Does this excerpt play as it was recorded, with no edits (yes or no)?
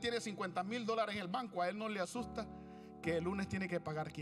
yes